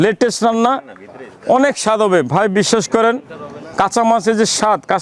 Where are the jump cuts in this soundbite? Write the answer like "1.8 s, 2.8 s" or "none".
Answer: none